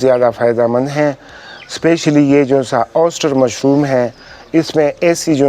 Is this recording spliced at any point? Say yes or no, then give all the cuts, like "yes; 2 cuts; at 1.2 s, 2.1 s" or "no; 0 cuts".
no; 0 cuts